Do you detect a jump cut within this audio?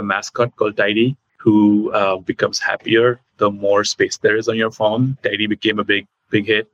yes; 1 cut; at 1.3 s

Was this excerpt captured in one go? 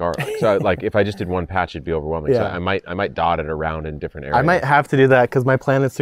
yes; 0 cuts

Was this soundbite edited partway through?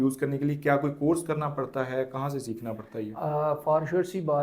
no; 0 cuts

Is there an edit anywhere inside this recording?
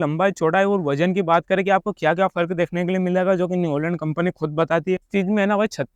yes; 1 cut; at 5.0 s

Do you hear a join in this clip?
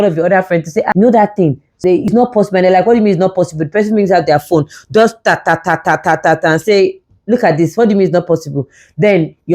yes; 1 cut; at 2.1 s

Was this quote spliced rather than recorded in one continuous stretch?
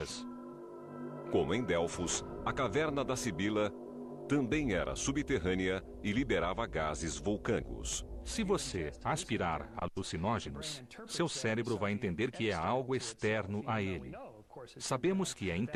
no; 0 cuts

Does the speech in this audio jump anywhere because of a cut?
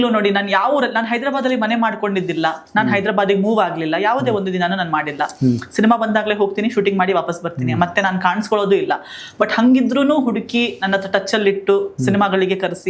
no; 0 cuts

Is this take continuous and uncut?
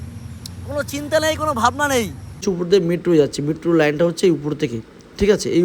no; 1 cut; at 2.4 s

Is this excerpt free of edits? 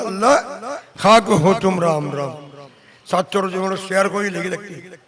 yes; 0 cuts

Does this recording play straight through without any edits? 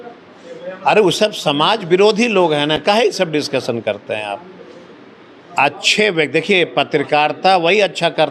yes; 0 cuts

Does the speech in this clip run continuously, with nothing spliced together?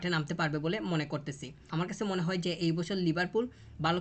no; 1 cut; at 1.7 s

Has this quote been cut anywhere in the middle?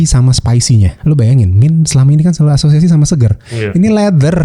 yes; 1 cut; at 0.9 s

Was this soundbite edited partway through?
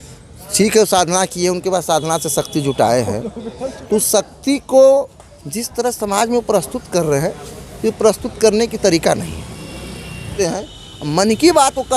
yes; 1 cut; at 10.3 s

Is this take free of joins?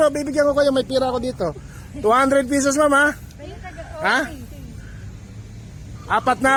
yes; 0 cuts

